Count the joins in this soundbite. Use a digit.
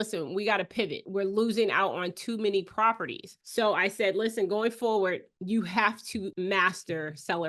2